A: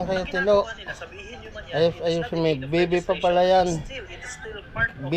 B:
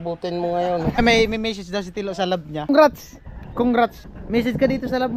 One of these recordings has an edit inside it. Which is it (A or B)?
B